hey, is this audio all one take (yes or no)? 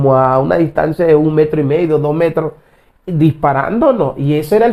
yes